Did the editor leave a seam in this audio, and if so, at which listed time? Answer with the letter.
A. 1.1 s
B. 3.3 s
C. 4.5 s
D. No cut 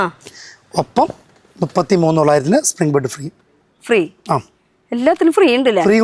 D